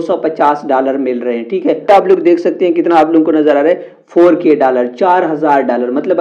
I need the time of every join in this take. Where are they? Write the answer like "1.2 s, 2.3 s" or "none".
none